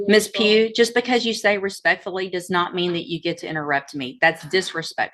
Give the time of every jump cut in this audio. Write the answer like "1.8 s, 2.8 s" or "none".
none